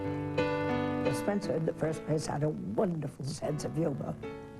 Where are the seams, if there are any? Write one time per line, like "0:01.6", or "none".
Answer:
0:02.2